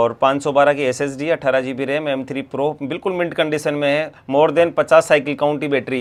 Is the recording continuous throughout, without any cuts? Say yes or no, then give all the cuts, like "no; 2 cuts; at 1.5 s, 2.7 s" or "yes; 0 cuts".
yes; 0 cuts